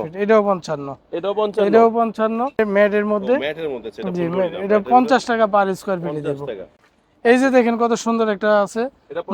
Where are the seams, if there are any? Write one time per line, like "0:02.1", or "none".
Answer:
0:02.6
0:06.8

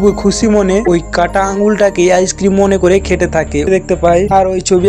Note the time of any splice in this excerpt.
0:03.7

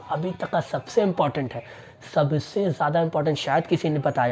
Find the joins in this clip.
none

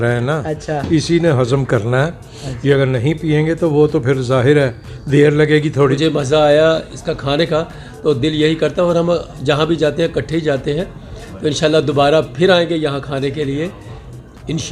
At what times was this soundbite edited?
0:06.0

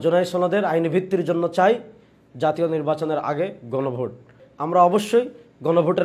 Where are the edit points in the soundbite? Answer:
0:04.4

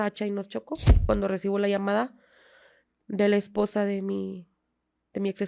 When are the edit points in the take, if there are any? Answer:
0:01.0

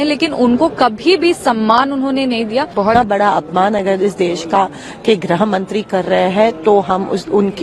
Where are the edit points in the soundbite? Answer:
0:02.9

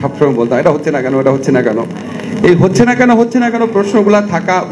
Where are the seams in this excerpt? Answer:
none

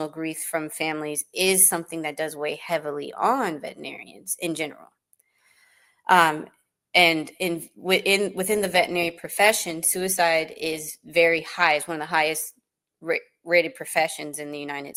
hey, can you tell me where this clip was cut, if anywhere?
none

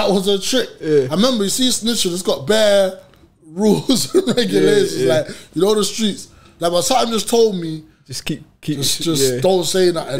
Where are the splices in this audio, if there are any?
0:06.5

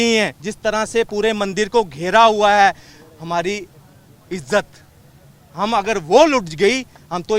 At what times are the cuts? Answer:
none

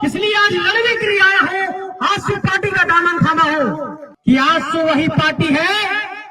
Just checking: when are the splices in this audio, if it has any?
0:04.0

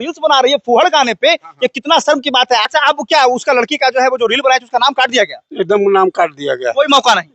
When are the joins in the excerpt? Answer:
0:02.6

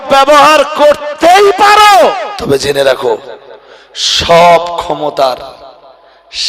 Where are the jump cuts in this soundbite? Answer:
0:02.3

